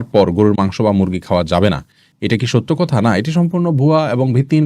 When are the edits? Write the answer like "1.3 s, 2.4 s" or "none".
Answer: none